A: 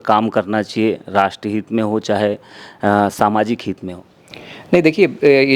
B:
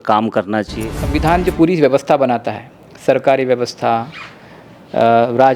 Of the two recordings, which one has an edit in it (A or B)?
B